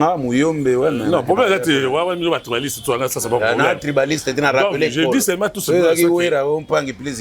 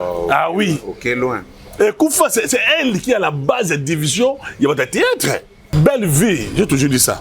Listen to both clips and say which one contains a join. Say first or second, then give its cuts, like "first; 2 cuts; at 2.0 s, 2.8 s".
second; 1 cut; at 5.6 s